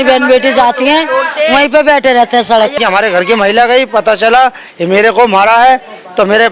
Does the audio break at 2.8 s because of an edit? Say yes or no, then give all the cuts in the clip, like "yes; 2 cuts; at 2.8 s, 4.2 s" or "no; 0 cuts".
yes; 1 cut; at 2.8 s